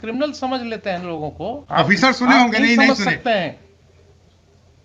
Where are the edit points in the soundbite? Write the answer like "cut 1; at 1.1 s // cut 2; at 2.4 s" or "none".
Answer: cut 1; at 1.6 s